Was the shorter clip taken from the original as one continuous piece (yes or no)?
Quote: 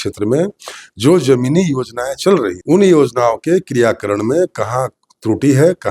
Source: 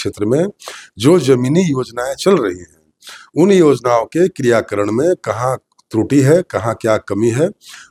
no